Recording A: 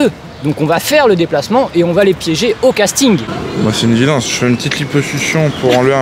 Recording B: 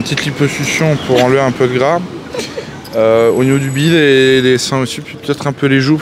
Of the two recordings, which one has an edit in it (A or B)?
A